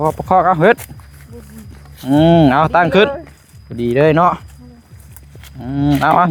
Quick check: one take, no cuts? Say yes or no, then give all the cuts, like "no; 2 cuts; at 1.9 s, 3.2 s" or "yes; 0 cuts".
yes; 0 cuts